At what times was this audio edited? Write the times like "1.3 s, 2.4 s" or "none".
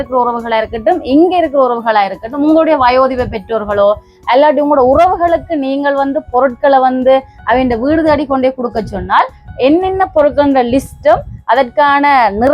none